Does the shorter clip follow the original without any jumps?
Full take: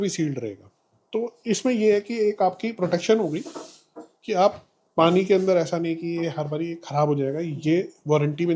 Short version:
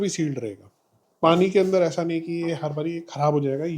no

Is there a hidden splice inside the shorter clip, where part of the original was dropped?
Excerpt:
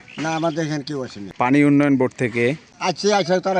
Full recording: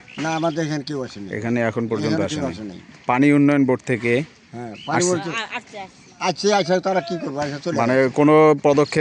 yes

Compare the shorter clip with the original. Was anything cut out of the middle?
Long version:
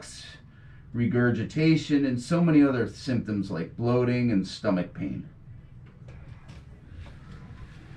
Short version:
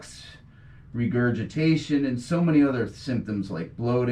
no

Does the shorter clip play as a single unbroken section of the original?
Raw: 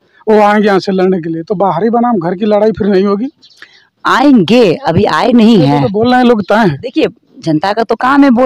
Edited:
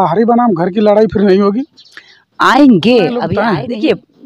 no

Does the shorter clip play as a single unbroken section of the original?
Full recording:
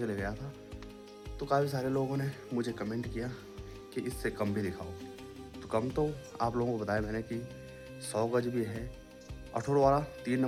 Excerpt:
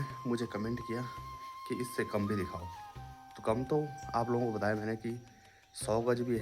yes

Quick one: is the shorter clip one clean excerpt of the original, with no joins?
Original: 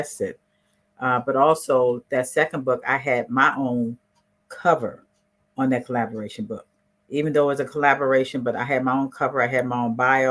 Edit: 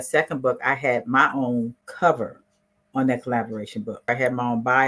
no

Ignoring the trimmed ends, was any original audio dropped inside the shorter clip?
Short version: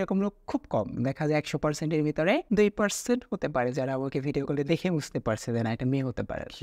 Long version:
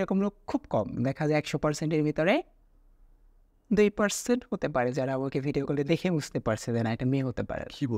yes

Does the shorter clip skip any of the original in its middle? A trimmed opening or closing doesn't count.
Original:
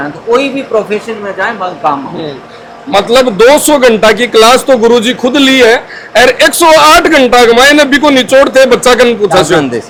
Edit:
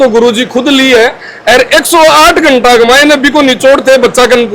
no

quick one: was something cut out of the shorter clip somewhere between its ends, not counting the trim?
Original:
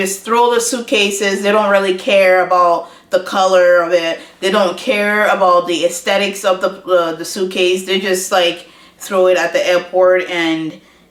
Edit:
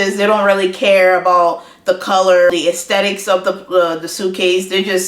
yes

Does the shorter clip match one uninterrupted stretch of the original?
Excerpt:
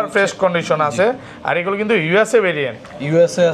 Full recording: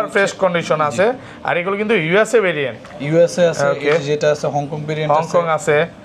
yes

